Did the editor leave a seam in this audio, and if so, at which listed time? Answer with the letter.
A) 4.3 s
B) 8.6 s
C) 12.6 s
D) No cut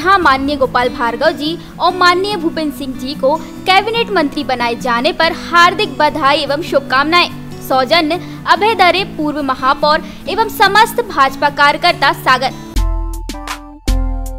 C